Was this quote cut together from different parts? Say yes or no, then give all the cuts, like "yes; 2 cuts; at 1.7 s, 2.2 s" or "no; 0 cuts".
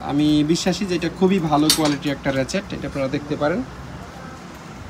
no; 0 cuts